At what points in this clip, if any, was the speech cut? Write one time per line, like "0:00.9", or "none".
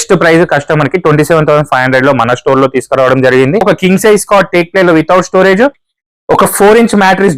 0:03.6